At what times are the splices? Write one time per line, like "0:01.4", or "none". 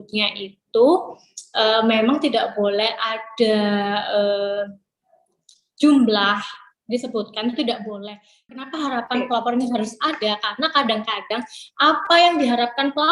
0:08.5

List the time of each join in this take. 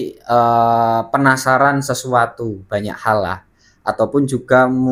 none

